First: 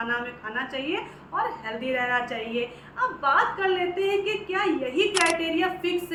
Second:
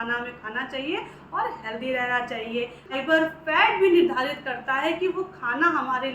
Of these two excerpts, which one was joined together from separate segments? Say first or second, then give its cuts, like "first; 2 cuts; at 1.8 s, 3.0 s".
second; 1 cut; at 2.9 s